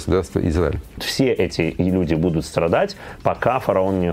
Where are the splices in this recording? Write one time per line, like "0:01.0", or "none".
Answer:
0:01.1